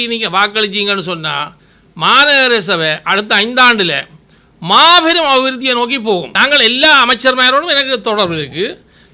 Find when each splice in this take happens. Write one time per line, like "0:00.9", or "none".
0:06.3